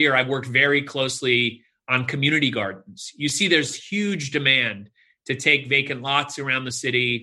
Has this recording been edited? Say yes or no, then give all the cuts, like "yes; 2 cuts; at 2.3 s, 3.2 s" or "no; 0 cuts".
no; 0 cuts